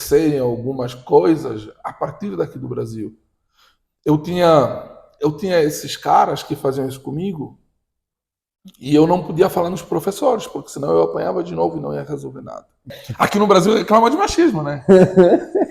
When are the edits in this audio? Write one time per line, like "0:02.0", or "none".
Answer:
0:13.0